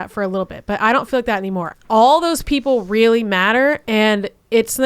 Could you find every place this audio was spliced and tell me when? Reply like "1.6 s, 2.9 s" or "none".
1.7 s, 3.8 s